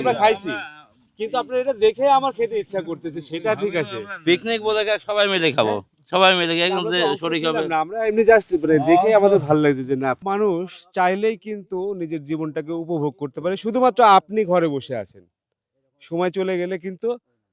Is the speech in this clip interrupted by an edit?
yes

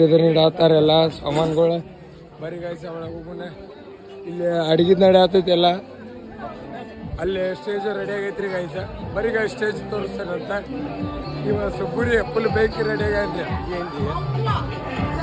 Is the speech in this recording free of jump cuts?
yes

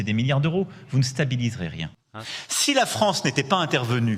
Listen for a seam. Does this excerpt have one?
yes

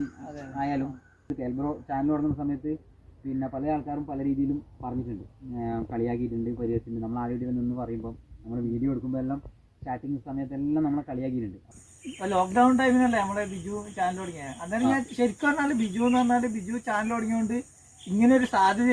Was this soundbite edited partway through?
yes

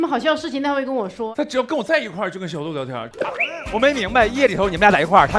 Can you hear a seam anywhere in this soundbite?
yes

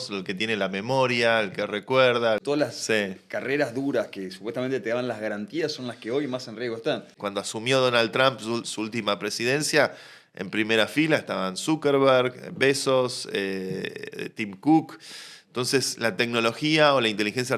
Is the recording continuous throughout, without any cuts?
no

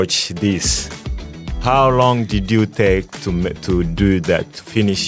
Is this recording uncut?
no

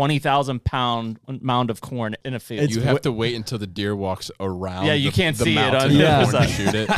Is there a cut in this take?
yes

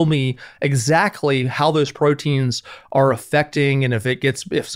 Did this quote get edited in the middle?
no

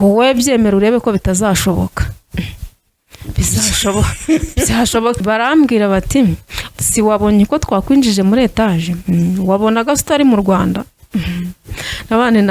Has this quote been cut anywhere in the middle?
yes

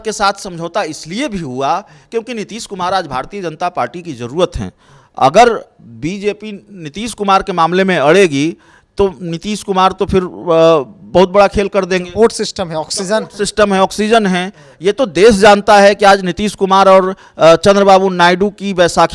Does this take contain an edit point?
no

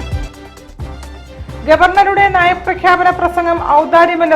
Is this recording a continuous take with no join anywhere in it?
no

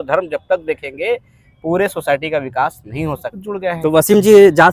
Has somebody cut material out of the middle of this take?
yes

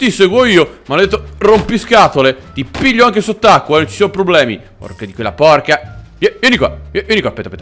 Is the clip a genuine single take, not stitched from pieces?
yes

